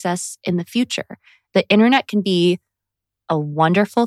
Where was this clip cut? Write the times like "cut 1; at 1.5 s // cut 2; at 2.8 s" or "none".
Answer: cut 1; at 1.4 s